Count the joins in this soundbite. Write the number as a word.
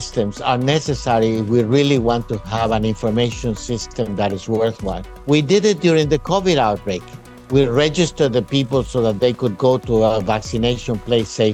zero